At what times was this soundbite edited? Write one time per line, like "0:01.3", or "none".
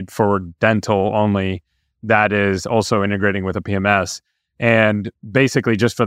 none